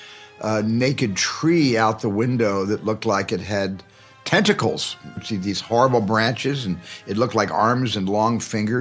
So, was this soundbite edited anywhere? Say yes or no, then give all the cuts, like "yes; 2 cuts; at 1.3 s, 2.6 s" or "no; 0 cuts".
yes; 1 cut; at 5.2 s